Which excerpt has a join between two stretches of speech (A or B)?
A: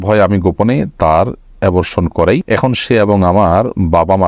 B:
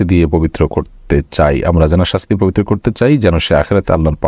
A